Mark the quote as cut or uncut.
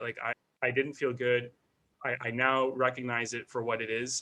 uncut